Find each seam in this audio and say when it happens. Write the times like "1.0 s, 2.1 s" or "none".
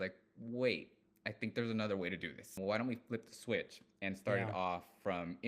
2.6 s